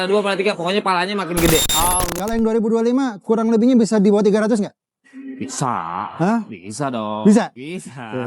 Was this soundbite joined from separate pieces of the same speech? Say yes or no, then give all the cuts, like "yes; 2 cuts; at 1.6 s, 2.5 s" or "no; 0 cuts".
yes; 1 cut; at 2.1 s